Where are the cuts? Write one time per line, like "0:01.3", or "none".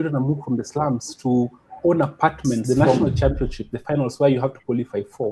0:02.6